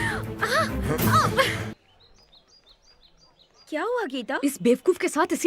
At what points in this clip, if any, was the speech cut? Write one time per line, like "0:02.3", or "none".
0:01.7